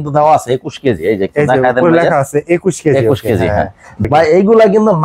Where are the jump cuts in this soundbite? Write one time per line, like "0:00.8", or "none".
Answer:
0:03.9